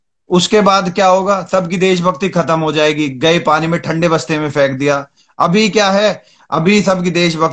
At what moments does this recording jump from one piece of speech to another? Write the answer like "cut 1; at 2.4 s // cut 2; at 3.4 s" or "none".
none